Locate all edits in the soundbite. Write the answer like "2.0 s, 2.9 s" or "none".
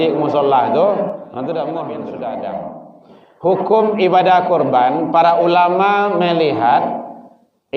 2.0 s